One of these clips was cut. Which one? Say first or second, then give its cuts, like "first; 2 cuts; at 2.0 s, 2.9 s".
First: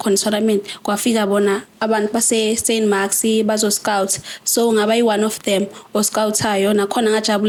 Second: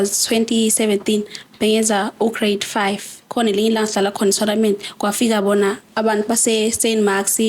second; 1 cut; at 3.2 s